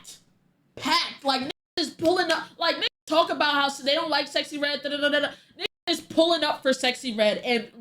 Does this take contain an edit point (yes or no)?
no